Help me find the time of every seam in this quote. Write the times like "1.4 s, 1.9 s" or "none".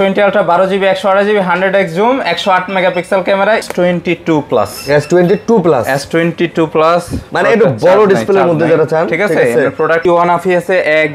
3.7 s, 10.0 s